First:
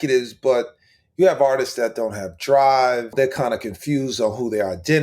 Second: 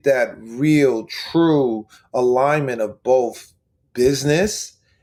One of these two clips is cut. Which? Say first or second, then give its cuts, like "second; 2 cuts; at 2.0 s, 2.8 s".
first; 1 cut; at 3.1 s